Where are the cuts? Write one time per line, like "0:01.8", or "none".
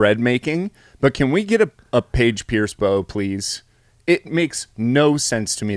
none